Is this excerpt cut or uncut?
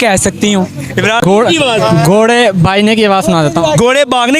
cut